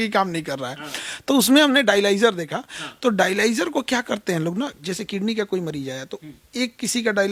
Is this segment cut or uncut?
uncut